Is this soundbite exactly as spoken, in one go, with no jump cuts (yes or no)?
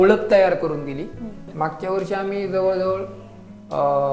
no